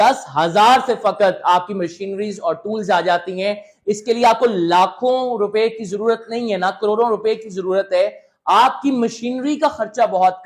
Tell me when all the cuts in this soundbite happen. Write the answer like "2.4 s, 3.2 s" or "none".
none